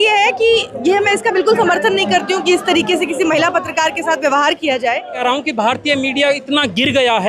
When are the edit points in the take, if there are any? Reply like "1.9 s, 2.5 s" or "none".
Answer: 5.2 s